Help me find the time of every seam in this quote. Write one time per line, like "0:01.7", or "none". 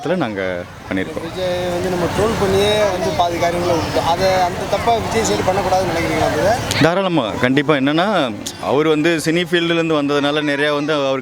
none